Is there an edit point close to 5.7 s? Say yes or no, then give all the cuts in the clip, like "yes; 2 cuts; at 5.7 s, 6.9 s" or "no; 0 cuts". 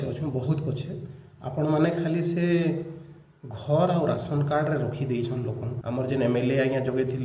yes; 1 cut; at 5.7 s